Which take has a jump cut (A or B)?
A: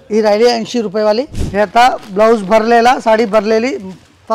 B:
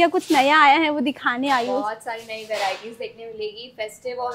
A